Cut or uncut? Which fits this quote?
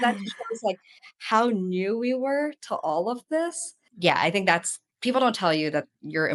cut